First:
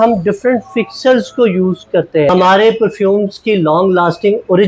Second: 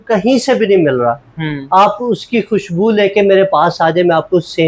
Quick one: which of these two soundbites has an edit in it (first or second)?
first